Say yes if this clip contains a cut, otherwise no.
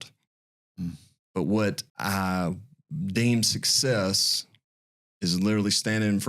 yes